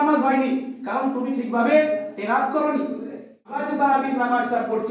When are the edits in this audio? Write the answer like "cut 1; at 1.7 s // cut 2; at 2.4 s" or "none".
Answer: cut 1; at 3.6 s

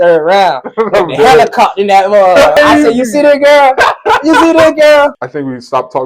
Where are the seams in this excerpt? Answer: cut 1; at 2.6 s // cut 2; at 5.2 s

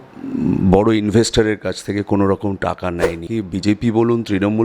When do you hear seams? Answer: cut 1; at 3.2 s

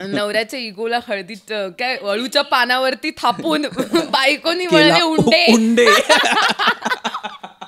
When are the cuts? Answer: none

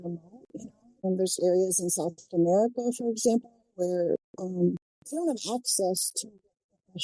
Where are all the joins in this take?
cut 1; at 4.9 s

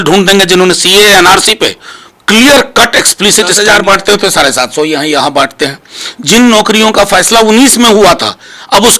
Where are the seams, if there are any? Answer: cut 1; at 3.6 s

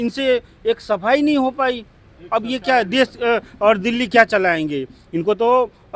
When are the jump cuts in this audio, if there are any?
none

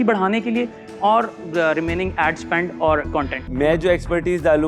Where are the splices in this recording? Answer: cut 1; at 3.4 s

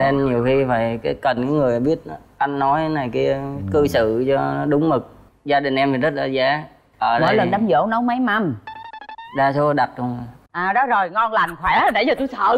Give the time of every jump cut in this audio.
cut 1; at 5.2 s

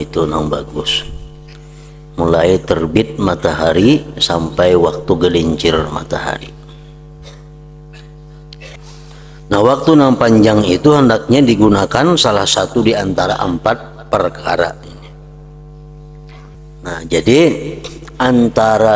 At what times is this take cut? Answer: cut 1; at 8.8 s // cut 2; at 16.5 s

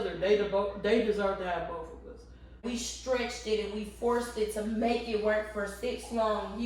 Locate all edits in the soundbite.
cut 1; at 2.6 s

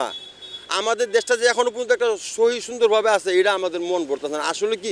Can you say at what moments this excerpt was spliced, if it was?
none

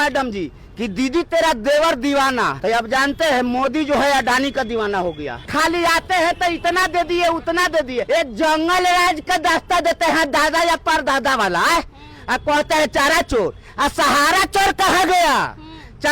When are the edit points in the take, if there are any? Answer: cut 1; at 2.5 s // cut 2; at 5.5 s // cut 3; at 8.1 s

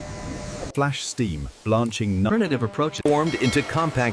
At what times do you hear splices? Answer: cut 1; at 2.3 s

